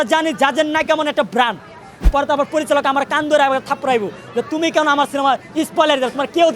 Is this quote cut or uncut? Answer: cut